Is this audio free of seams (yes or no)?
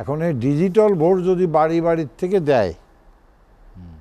yes